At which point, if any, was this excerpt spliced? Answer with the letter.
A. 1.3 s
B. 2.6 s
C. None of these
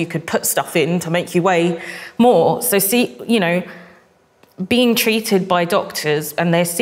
C